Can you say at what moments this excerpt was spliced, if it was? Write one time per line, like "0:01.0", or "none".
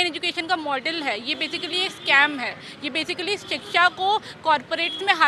none